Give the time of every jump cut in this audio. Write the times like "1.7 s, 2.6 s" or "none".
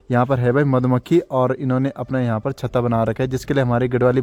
none